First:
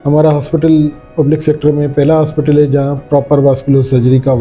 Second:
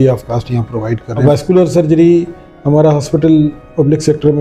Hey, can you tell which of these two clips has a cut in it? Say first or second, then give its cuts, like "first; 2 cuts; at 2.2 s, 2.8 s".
second; 1 cut; at 1.1 s